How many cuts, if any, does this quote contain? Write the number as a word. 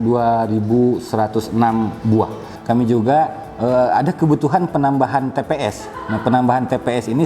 one